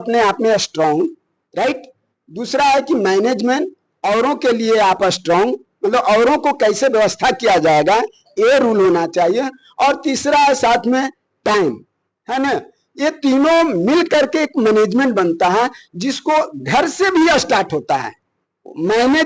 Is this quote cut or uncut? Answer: uncut